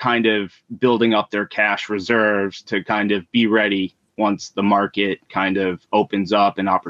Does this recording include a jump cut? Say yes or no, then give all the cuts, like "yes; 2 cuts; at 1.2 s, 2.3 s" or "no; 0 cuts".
no; 0 cuts